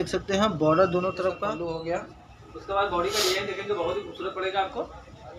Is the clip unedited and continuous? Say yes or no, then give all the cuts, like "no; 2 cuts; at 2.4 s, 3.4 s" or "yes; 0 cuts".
no; 1 cut; at 1.5 s